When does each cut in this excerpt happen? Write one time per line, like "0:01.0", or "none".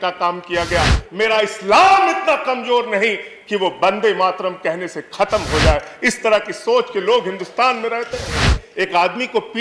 0:01.0
0:08.6

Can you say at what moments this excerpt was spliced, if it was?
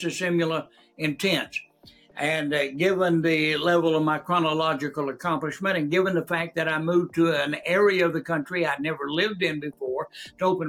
none

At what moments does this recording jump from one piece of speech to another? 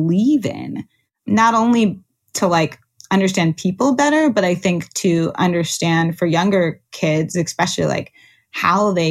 0:01.3
0:02.3

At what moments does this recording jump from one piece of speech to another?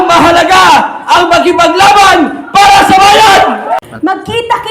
0:03.8

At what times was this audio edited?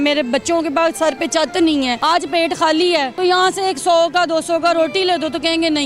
0:02.0
0:03.1

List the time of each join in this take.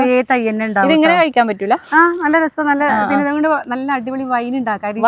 none

